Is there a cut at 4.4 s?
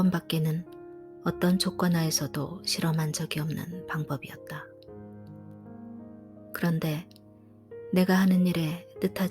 yes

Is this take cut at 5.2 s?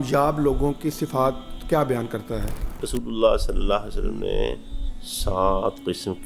no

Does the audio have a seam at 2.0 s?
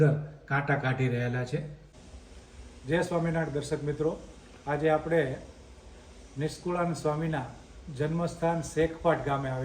yes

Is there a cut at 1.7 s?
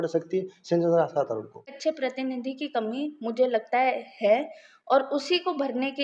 yes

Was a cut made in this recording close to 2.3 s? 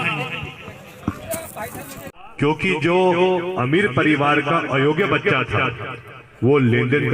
yes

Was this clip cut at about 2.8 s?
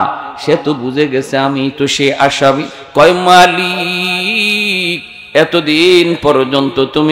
yes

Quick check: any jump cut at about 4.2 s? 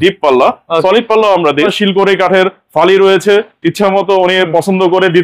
no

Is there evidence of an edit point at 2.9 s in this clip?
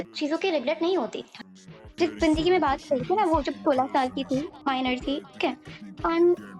no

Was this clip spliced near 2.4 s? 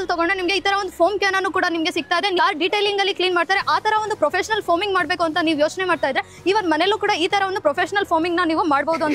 yes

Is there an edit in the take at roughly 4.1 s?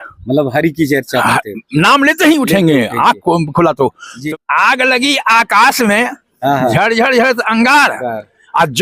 yes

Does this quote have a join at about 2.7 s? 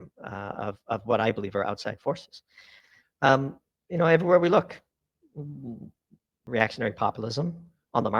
yes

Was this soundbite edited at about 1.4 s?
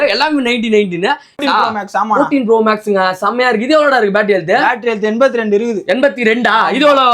yes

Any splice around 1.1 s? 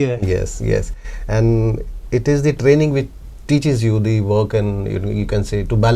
no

